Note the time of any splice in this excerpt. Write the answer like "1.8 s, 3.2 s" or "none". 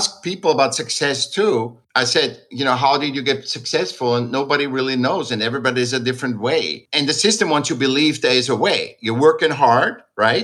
1.8 s